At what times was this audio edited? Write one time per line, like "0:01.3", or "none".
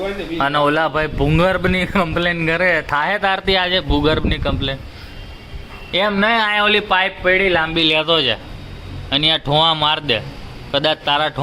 none